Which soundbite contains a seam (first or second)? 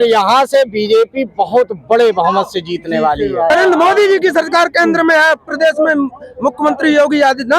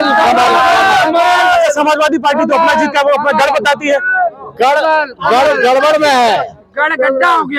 first